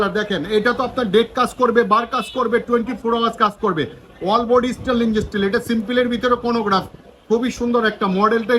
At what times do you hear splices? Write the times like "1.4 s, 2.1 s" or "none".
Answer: none